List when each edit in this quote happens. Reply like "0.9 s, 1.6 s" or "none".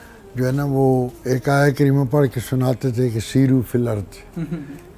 none